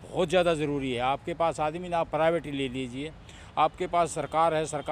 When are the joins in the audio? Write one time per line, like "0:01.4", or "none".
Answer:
none